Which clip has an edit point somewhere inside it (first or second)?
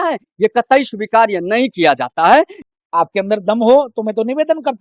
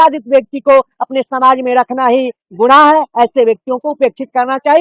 first